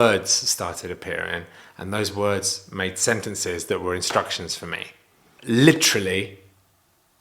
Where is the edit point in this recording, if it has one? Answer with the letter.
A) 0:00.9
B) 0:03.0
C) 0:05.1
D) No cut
D